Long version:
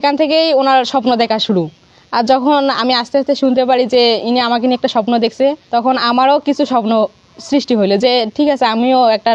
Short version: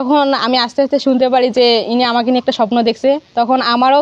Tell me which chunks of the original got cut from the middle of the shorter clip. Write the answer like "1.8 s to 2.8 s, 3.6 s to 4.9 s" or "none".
none